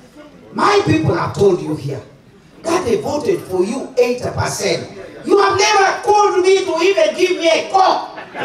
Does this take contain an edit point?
no; 0 cuts

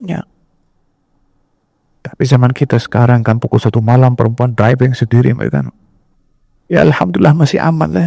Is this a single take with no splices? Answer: yes; 0 cuts

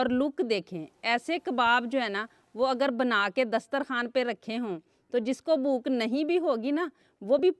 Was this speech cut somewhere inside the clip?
no; 0 cuts

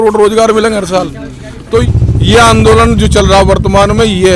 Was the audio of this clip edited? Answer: yes; 1 cut; at 1.8 s

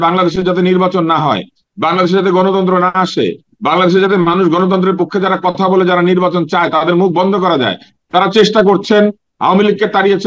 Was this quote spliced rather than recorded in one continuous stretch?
no; 0 cuts

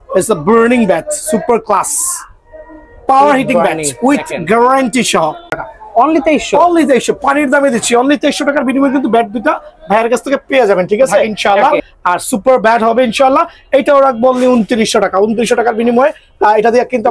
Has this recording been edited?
yes; 2 cuts; at 5.7 s, 11.3 s

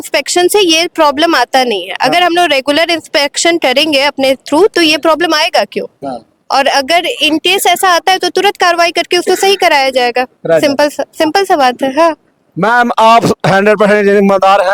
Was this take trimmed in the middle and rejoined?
no; 0 cuts

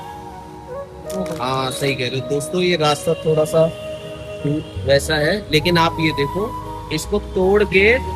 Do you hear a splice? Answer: yes; 1 cut; at 1.1 s

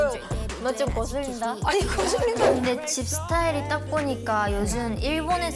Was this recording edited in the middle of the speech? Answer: yes; 1 cut; at 2.5 s

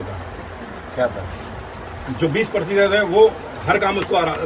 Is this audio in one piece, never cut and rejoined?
yes; 0 cuts

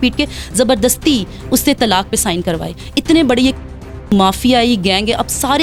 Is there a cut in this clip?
no; 0 cuts

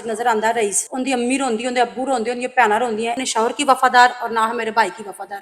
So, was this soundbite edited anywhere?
yes; 1 cut; at 3.2 s

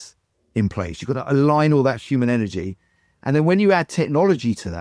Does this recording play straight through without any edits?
yes; 0 cuts

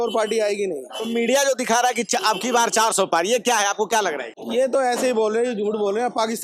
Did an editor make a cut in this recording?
no; 0 cuts

